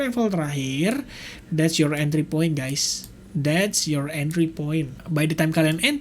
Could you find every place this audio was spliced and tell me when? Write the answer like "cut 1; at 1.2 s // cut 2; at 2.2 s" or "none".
cut 1; at 5.0 s